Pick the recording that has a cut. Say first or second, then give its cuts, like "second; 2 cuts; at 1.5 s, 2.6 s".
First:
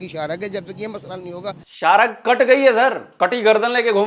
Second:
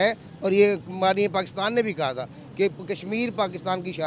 first; 2 cuts; at 1.7 s, 3.1 s